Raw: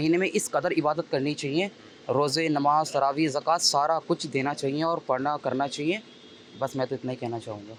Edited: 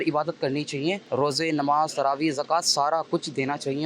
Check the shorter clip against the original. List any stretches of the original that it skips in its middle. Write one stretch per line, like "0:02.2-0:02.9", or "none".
0:01.7-0:02.0